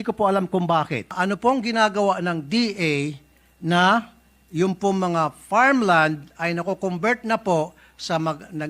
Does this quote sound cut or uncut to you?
cut